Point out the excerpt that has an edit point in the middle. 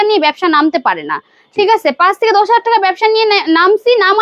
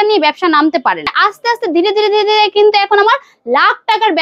second; 1 cut; at 1.1 s

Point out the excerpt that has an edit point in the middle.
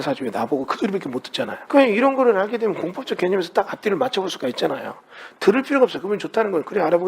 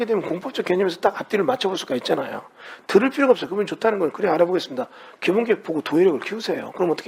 first; 1 cut; at 1.6 s

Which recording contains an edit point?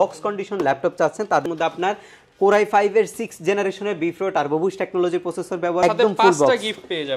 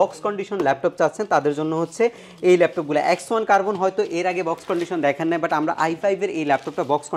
first; 2 cuts; at 1.4 s, 5.8 s

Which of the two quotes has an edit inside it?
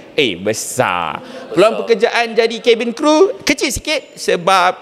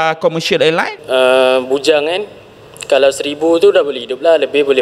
second; 1 cut; at 1.0 s

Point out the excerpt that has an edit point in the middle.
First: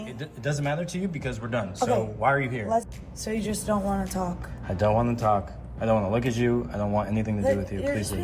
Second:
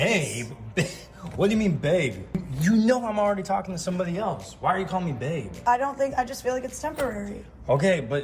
first; 1 cut; at 2.9 s

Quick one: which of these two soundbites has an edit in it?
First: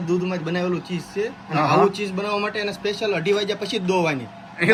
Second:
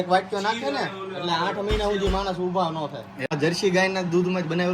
second; 1 cut; at 3.1 s

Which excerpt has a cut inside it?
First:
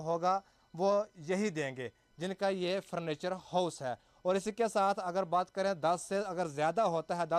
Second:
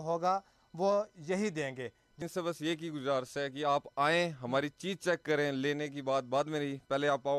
second; 1 cut; at 2.2 s

